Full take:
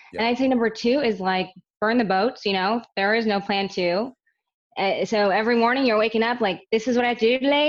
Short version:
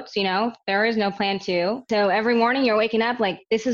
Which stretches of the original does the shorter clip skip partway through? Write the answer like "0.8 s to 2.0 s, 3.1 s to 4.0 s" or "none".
4.2 s to 5.1 s

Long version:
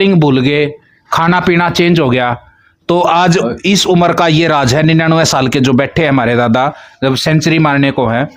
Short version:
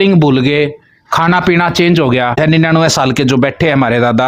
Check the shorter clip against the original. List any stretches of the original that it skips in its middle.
2.4 s to 4.7 s

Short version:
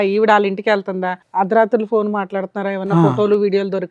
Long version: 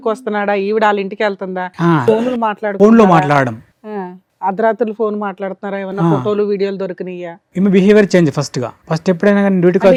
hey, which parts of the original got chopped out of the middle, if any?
1.7 s to 4.2 s

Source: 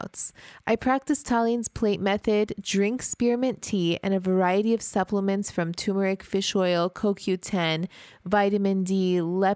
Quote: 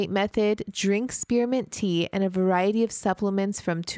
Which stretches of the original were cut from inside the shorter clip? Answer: none

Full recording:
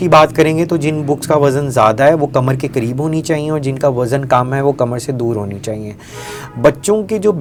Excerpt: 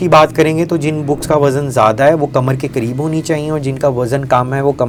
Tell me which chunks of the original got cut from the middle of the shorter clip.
none

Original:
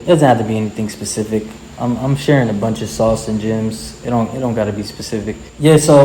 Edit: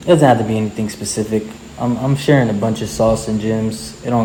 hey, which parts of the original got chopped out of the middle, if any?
none

